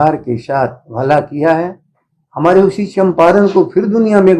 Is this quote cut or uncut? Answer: uncut